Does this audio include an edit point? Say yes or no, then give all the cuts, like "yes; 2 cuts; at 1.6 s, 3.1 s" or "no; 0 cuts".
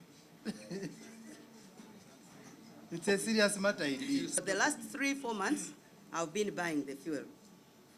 yes; 1 cut; at 4.4 s